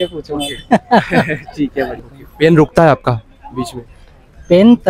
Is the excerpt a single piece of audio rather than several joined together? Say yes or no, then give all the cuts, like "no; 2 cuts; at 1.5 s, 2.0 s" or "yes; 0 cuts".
no; 1 cut; at 2.0 s